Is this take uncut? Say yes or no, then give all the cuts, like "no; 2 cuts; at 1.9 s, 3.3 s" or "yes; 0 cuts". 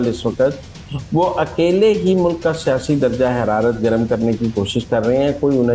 yes; 0 cuts